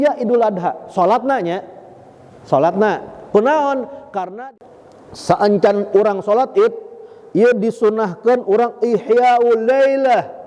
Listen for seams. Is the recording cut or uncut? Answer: cut